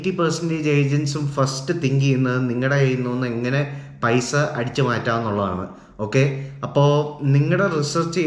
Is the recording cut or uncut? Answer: uncut